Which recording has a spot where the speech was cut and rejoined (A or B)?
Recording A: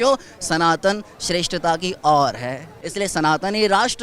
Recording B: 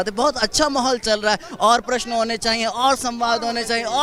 A